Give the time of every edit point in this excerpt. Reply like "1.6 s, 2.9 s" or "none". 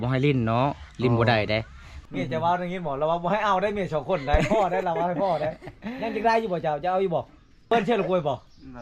1.9 s, 7.7 s